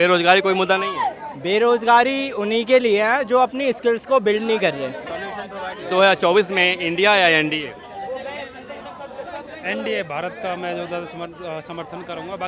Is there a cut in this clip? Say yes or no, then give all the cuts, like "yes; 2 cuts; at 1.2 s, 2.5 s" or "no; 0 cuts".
yes; 1 cut; at 5.2 s